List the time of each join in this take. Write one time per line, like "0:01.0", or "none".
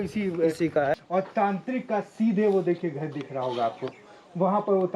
0:00.9